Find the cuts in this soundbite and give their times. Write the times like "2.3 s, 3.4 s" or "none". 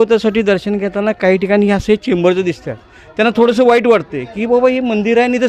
none